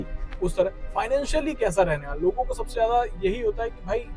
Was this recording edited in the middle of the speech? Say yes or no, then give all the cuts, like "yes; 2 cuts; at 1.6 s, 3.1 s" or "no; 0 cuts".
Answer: no; 0 cuts